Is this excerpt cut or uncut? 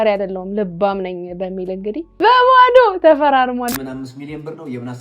cut